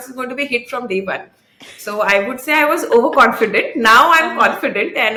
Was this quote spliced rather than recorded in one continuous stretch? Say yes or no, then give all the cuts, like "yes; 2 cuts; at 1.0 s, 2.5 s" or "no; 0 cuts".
no; 0 cuts